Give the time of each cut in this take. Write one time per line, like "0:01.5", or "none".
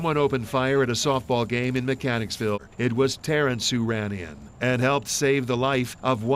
0:02.7